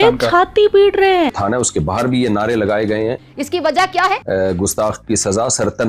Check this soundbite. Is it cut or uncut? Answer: cut